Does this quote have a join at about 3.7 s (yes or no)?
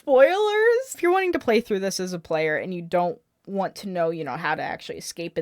no